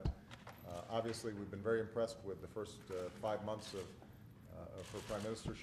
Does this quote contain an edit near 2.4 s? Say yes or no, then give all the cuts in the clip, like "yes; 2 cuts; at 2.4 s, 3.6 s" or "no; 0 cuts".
no; 0 cuts